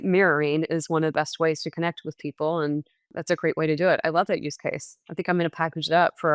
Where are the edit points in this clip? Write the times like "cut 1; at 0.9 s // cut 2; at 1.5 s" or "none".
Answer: cut 1; at 3.1 s